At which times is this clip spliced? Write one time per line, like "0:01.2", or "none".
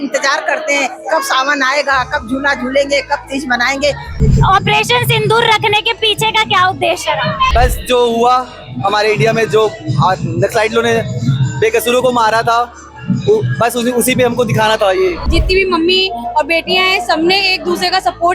0:04.2
0:07.5
0:15.2